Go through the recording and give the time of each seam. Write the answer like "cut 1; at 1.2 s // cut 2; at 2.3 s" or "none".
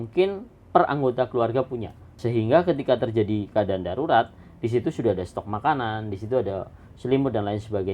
cut 1; at 2.1 s